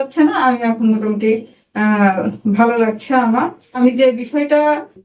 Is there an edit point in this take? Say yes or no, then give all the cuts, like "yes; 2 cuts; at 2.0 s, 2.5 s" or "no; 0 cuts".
yes; 1 cut; at 3.7 s